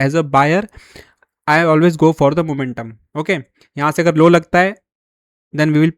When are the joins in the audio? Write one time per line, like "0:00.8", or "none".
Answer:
none